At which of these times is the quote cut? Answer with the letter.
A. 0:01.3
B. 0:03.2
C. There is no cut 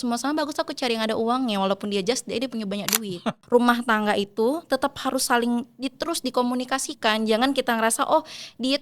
B